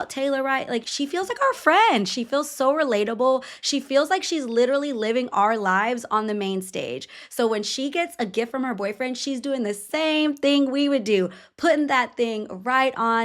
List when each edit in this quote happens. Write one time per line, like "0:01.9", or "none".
0:01.0